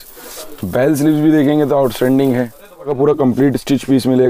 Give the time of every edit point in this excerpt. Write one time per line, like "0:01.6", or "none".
0:02.9

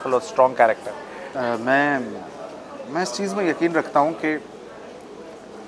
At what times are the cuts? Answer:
0:01.2

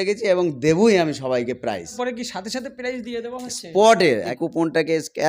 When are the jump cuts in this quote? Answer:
0:01.9
0:04.3

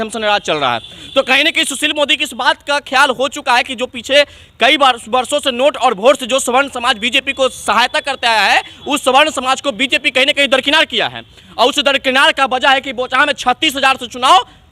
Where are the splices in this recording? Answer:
none

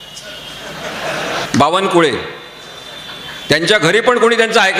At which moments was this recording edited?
0:01.5

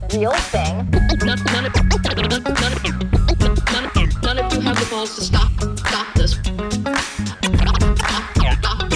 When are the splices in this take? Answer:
none

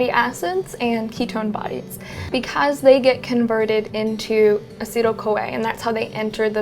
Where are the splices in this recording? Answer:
0:02.3

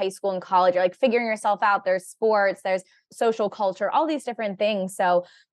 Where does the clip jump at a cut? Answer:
0:03.1

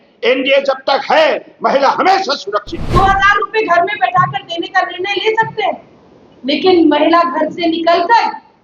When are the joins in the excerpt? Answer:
0:02.9

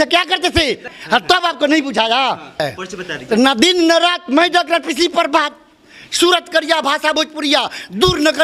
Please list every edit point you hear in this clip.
0:00.9
0:02.6

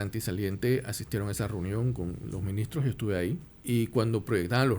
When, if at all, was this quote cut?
0:03.5

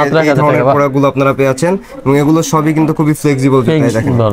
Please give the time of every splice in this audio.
none

